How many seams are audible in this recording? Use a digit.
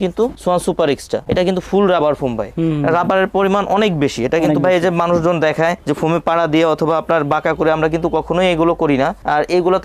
0